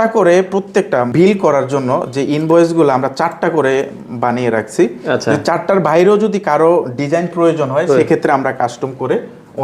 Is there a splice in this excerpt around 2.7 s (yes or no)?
no